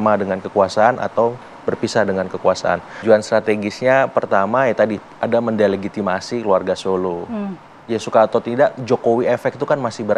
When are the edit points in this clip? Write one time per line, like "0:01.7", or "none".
0:02.9